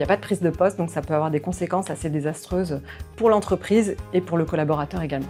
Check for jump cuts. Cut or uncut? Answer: uncut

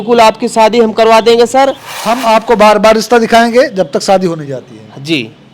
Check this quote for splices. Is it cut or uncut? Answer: cut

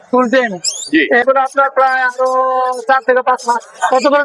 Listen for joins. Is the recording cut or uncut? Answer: cut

